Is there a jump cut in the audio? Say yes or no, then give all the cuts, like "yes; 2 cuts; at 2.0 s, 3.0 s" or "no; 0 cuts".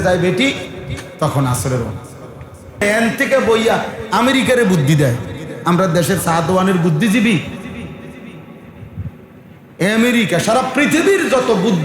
yes; 1 cut; at 2.8 s